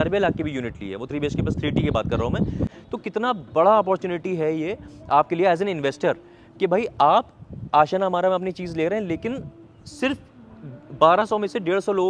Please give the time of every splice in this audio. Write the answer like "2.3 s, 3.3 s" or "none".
2.7 s